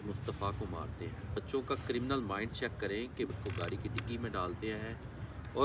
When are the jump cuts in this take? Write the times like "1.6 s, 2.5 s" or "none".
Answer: 1.4 s, 3.4 s